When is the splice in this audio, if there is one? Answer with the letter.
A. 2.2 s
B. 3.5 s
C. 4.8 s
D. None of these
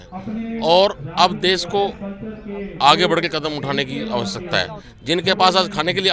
C